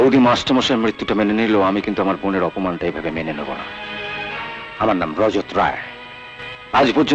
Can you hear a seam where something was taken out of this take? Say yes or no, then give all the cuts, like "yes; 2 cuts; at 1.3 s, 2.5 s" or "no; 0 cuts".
no; 0 cuts